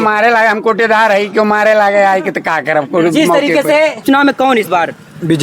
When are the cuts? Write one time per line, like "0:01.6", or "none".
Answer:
0:04.0